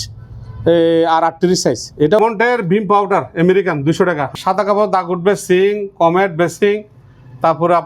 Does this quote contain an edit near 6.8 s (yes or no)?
no